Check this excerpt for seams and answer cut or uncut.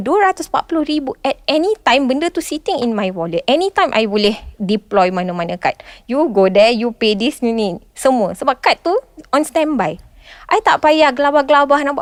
uncut